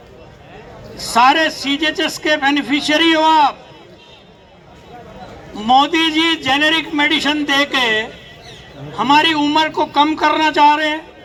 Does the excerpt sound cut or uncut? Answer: uncut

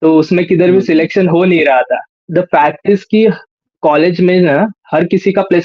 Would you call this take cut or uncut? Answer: cut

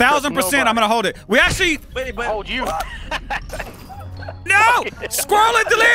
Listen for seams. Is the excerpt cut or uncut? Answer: uncut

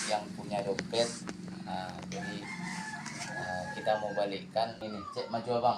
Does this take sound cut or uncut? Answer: cut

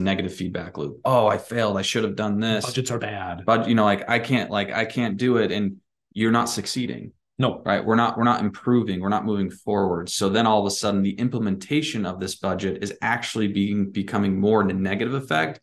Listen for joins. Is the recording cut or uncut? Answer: uncut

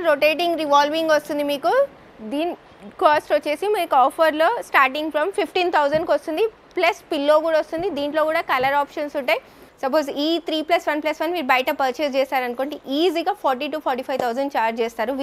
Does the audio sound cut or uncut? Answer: cut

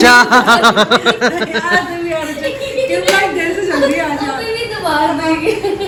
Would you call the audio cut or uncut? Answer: uncut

